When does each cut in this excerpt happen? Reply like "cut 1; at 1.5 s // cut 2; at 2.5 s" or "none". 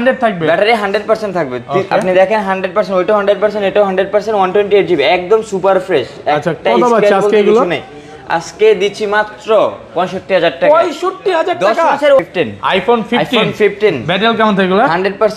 cut 1; at 12.2 s